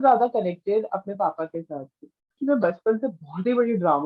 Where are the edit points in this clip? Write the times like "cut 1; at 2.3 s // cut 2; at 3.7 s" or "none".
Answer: cut 1; at 2.4 s